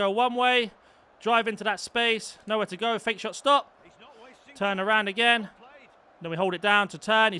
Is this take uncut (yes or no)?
yes